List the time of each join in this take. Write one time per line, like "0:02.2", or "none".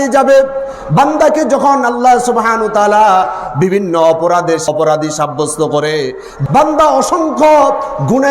0:04.7
0:06.4